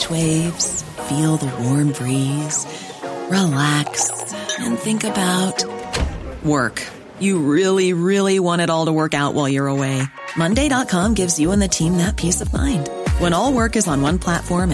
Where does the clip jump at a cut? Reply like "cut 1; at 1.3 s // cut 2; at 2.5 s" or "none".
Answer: none